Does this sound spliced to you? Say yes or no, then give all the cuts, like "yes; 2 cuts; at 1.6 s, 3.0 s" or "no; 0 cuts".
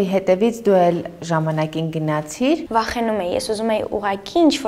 yes; 1 cut; at 2.7 s